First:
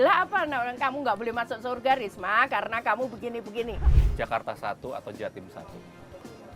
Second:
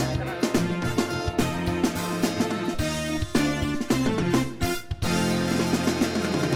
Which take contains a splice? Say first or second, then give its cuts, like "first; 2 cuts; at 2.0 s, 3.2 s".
first; 1 cut; at 3.9 s